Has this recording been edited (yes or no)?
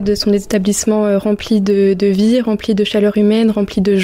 no